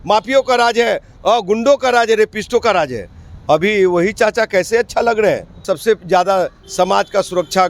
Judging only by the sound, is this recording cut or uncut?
cut